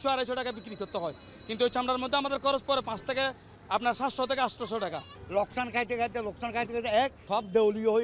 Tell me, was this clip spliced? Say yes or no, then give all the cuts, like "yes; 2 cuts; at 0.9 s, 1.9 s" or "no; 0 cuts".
yes; 2 cuts; at 5.1 s, 7.2 s